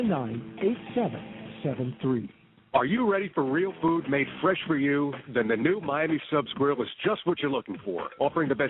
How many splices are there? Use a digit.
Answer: 1